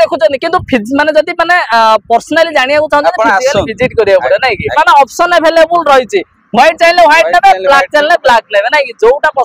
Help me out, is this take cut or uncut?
cut